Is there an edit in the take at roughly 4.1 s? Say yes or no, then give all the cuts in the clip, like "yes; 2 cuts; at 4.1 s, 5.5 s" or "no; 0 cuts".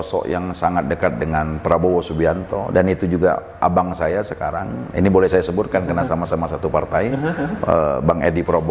no; 0 cuts